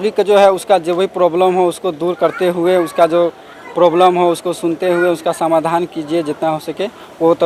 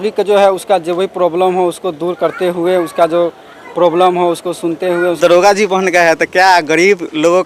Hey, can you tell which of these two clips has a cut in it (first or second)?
second